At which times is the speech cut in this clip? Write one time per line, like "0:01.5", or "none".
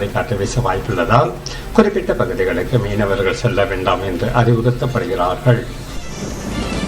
0:05.8